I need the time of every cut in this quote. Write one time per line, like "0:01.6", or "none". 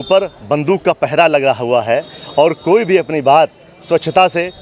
none